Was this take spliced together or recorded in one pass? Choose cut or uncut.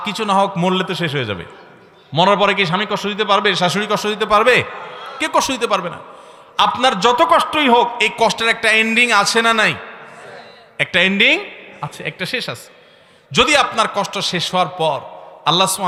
uncut